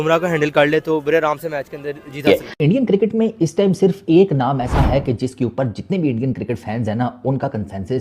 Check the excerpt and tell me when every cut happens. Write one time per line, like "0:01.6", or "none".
0:02.3